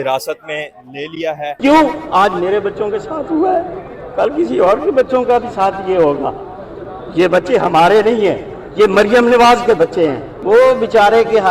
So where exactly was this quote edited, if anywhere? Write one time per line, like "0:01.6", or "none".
0:01.6
0:06.7
0:10.3